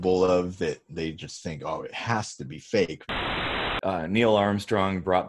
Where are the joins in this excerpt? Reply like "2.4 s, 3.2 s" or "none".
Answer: 3.2 s